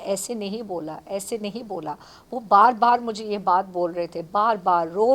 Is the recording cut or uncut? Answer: uncut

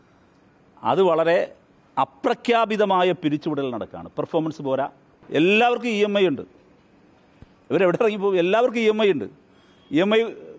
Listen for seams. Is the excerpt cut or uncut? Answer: cut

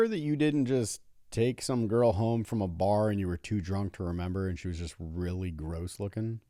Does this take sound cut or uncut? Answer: uncut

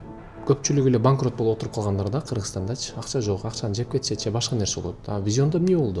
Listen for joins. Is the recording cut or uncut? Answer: uncut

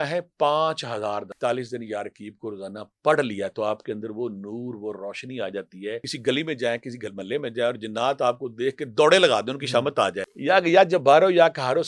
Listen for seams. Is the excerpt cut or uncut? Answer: cut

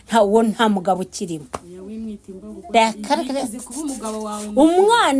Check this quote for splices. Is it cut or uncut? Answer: uncut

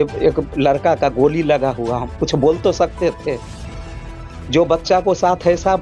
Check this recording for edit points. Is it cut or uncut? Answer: cut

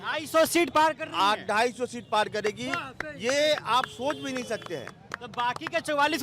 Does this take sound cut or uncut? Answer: uncut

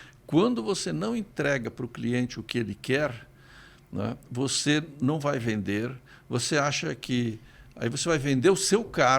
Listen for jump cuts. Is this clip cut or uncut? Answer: uncut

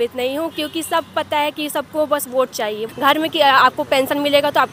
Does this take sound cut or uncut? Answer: cut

